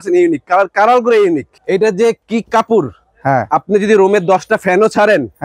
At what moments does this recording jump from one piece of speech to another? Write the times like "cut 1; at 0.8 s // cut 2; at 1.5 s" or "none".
cut 1; at 1.5 s